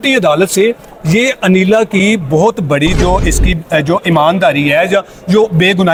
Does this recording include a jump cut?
no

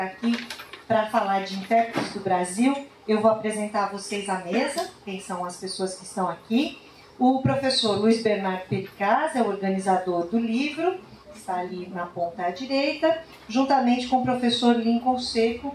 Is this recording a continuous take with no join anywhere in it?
no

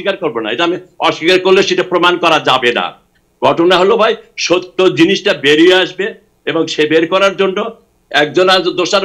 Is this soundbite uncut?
yes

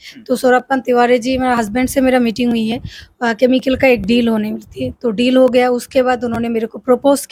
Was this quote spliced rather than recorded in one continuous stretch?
no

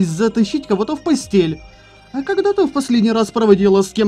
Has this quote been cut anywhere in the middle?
no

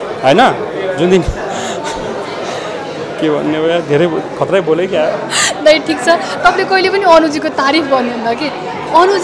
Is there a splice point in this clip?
no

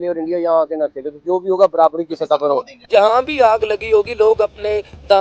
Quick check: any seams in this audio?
yes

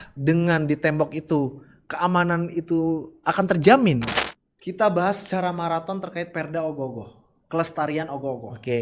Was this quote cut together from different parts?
yes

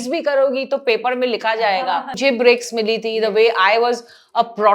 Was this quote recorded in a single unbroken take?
no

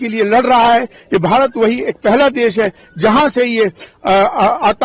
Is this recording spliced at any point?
no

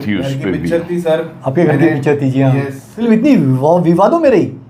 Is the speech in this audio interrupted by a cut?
yes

